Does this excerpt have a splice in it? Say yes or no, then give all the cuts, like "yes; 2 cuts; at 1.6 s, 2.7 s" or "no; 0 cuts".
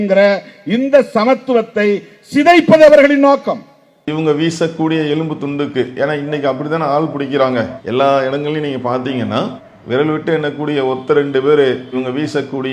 yes; 1 cut; at 4.0 s